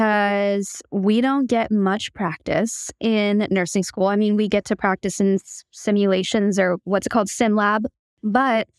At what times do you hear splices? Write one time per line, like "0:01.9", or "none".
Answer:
0:07.8